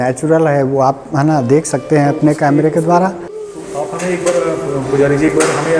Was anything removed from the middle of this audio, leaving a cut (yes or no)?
no